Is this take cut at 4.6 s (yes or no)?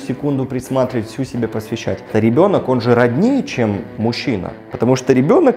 no